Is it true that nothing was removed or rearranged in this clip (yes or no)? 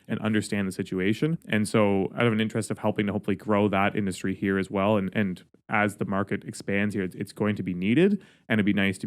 no